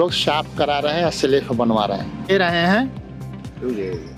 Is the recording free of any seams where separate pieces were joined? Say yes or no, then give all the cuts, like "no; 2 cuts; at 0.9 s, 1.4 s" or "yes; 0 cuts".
yes; 0 cuts